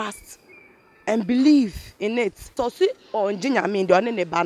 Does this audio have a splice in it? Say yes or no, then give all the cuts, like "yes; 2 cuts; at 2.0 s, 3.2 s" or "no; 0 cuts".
yes; 1 cut; at 2.6 s